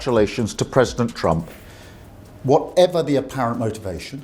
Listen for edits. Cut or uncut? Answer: uncut